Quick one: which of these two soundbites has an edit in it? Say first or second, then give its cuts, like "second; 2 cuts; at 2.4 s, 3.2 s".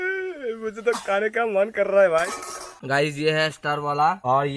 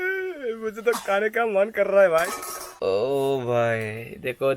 first; 1 cut; at 2.7 s